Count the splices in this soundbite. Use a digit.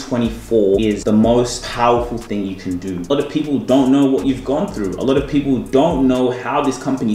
3